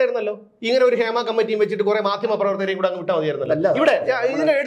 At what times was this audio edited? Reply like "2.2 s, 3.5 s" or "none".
none